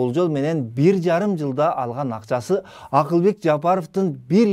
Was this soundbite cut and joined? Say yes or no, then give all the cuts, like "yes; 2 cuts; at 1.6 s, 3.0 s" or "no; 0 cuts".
no; 0 cuts